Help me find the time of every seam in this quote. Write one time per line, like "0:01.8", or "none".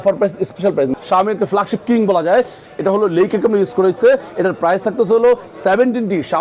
0:00.9